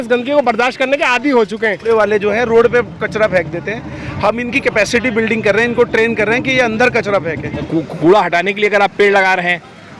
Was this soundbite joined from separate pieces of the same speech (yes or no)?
yes